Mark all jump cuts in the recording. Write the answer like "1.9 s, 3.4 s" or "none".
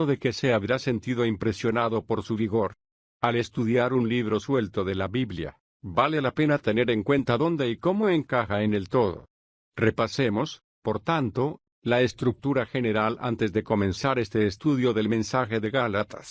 15.3 s